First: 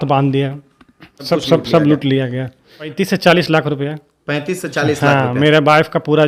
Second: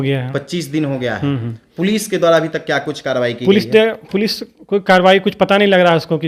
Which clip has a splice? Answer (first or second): first